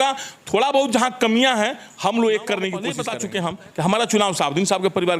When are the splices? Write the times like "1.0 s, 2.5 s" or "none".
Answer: 3.0 s